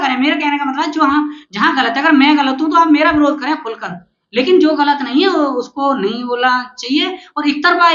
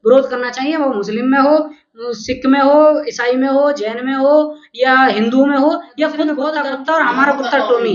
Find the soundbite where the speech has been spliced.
second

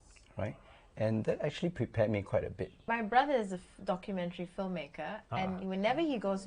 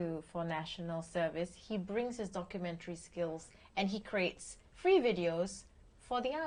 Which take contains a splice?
first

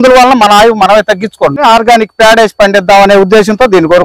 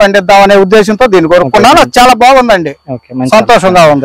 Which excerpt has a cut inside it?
first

